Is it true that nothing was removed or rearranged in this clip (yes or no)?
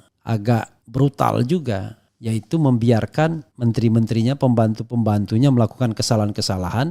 yes